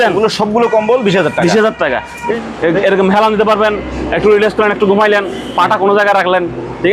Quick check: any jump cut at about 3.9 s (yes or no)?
no